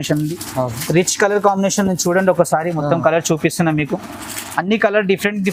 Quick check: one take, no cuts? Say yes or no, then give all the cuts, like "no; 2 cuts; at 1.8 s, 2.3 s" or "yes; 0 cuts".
yes; 0 cuts